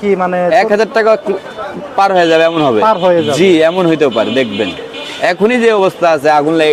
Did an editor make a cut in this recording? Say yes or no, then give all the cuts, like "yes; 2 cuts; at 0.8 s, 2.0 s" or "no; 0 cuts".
no; 0 cuts